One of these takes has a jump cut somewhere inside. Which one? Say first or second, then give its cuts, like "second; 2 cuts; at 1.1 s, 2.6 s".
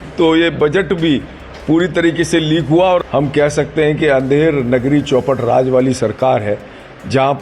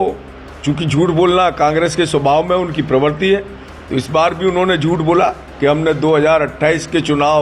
first; 1 cut; at 3.0 s